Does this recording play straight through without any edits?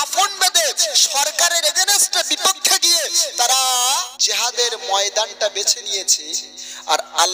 no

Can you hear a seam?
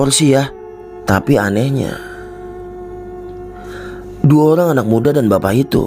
yes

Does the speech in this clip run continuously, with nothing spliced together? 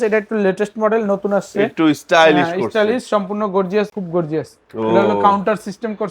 no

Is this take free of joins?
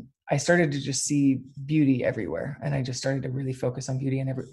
yes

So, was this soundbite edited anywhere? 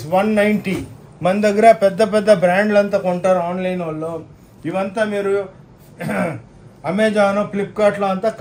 no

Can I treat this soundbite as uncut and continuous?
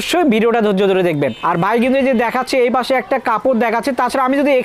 yes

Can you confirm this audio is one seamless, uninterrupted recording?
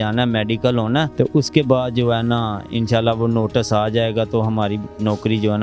no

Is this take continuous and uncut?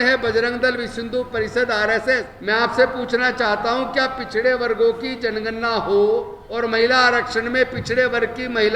no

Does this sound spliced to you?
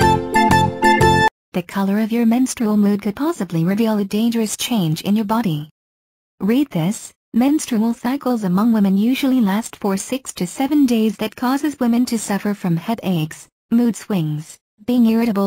yes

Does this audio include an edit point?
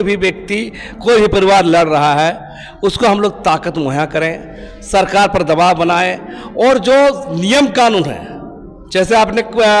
no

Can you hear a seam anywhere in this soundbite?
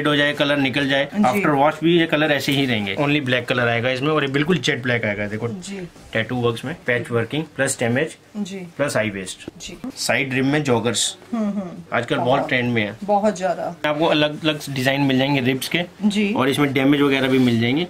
yes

